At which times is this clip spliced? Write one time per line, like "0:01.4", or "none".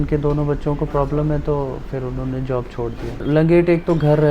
0:03.2